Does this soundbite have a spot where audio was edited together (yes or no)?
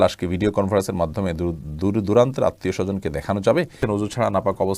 yes